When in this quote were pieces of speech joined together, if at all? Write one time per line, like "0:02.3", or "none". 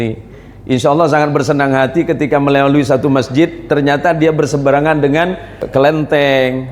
0:05.6